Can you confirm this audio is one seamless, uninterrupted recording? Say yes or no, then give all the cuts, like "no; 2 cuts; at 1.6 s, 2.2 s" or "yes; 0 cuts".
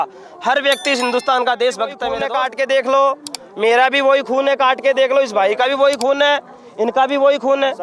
no; 1 cut; at 2.1 s